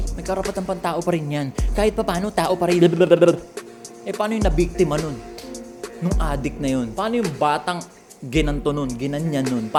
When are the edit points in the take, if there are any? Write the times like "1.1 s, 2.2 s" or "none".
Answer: none

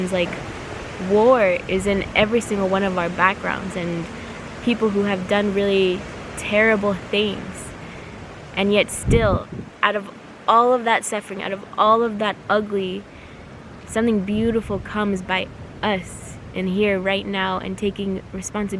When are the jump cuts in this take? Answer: none

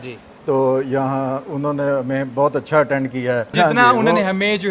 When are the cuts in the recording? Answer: 3.5 s

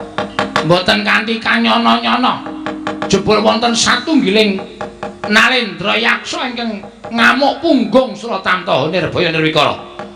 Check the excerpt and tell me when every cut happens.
none

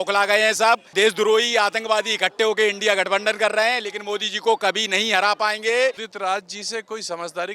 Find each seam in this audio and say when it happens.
0.9 s, 6.1 s

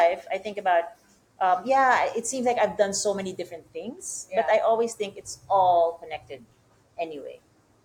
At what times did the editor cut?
none

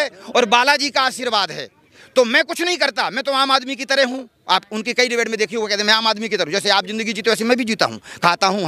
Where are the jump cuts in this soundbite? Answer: none

